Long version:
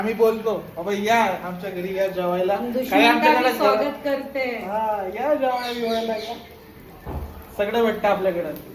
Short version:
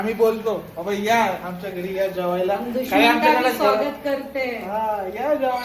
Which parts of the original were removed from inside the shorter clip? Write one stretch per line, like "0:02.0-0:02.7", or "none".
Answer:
none